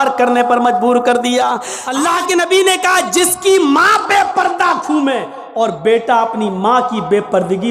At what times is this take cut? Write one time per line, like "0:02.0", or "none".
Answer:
0:01.8